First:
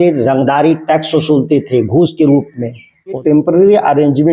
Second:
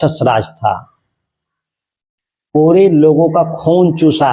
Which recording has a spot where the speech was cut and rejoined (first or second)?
first